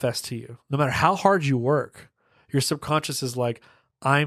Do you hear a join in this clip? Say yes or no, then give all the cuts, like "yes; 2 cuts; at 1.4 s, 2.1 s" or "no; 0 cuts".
no; 0 cuts